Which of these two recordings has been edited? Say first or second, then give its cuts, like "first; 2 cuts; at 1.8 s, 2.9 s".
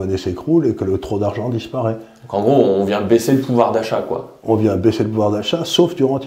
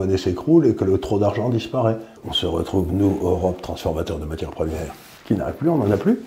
second; 2 cuts; at 2.1 s, 5.1 s